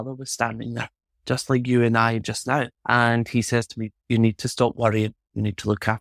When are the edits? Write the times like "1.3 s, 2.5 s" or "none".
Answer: 2.8 s

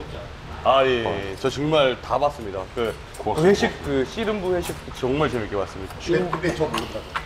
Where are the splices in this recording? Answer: 3.1 s, 5.9 s

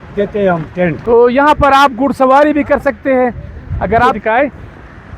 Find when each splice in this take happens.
1.0 s, 4.1 s

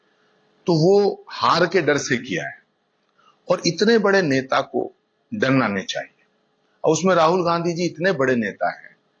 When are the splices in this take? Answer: none

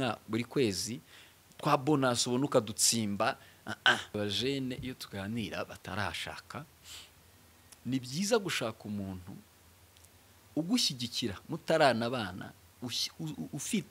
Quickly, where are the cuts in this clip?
4.1 s

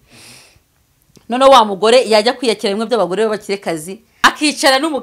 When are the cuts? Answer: 4.1 s

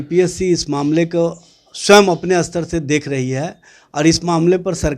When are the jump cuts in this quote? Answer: none

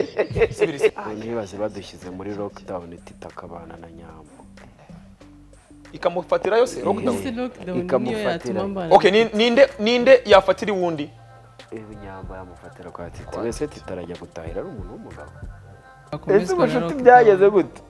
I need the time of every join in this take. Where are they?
0.9 s, 16.1 s

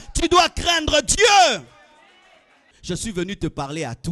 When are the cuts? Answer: 2.6 s

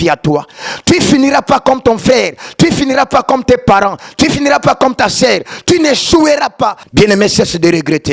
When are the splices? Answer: 6.8 s

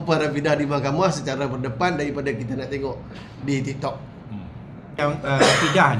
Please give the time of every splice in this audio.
5.0 s

